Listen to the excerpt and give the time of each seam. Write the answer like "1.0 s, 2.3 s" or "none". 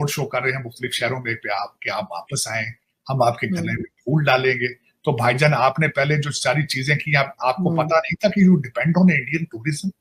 none